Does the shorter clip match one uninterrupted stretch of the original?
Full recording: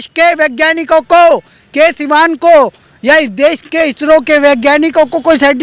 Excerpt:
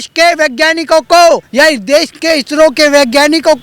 no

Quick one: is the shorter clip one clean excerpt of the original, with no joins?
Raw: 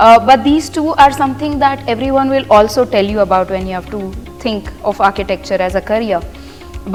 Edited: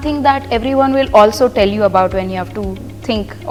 yes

